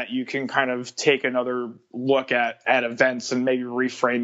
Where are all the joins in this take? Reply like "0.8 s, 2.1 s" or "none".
2.6 s